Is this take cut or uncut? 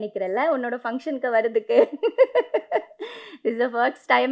uncut